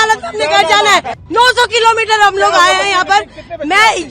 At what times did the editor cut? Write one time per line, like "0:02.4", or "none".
0:01.2